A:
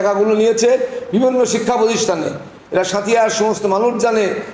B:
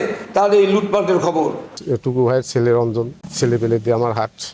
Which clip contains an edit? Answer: B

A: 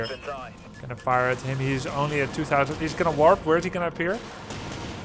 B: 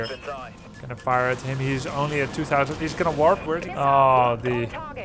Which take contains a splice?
B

